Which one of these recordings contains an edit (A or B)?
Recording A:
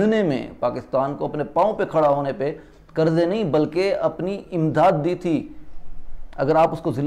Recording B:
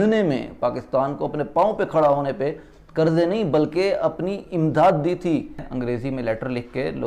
B